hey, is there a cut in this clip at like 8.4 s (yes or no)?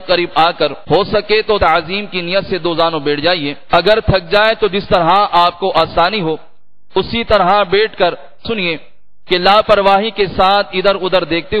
yes